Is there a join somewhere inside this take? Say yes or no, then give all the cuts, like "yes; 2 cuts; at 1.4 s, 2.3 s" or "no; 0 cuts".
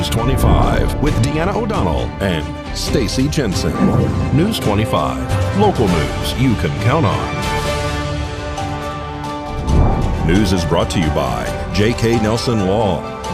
no; 0 cuts